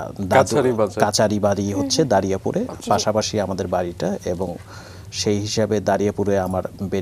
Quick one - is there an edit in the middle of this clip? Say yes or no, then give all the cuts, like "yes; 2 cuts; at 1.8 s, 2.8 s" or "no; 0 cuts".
no; 0 cuts